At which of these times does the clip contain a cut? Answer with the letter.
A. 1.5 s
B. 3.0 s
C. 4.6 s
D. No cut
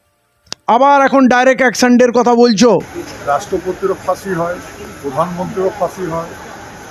B